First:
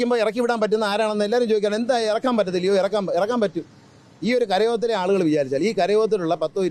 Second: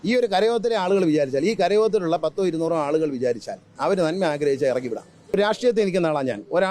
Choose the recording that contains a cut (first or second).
second